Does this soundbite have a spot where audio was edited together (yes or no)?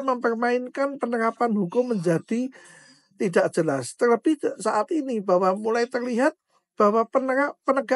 no